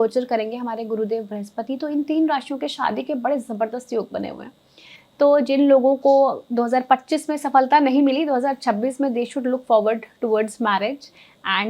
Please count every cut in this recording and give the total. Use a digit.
0